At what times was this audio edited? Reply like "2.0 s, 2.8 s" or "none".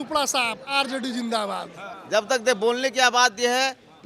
1.9 s